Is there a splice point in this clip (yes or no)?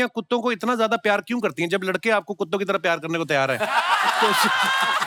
no